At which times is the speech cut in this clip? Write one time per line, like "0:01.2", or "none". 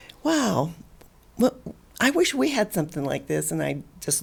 none

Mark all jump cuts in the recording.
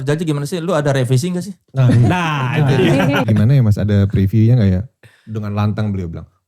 0:03.2

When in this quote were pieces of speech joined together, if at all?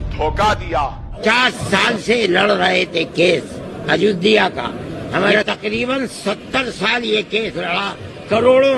0:01.1

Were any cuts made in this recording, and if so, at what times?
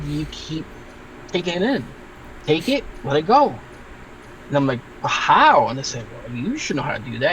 none

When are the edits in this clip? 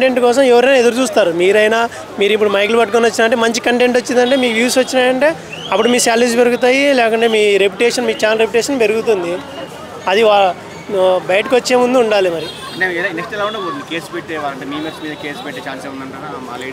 none

